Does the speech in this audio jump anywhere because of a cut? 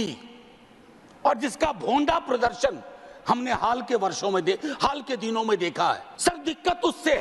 yes; 1 cut; at 6.1 s

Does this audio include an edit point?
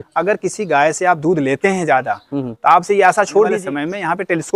yes; 1 cut; at 3.6 s

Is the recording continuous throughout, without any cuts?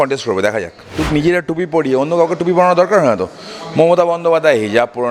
no; 1 cut; at 1.0 s

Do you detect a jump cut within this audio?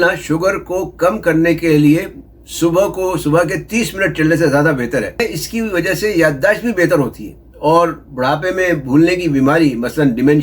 yes; 1 cut; at 5.2 s

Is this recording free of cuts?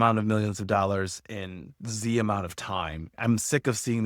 no; 1 cut; at 3.1 s

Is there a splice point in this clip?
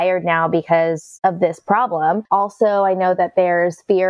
yes; 2 cuts; at 1.1 s, 2.2 s

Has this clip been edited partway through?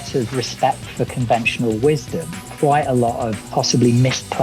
yes; 2 cuts; at 2.4 s, 3.4 s

